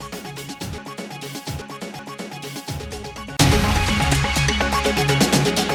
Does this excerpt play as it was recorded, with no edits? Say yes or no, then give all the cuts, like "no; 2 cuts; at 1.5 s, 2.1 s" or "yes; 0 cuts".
yes; 0 cuts